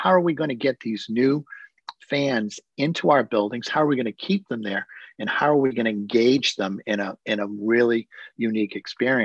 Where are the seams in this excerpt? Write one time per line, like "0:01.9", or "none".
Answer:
none